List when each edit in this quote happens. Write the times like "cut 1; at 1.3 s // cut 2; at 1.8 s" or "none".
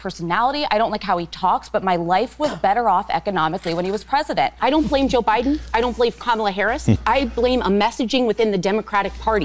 cut 1; at 4.6 s // cut 2; at 7.0 s